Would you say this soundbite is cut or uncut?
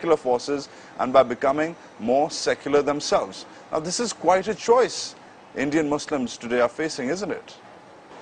cut